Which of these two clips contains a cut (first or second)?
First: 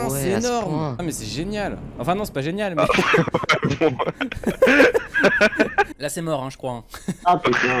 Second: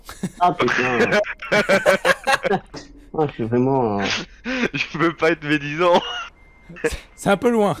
first